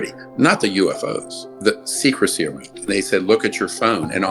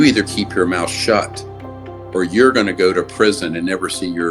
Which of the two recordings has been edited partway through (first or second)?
first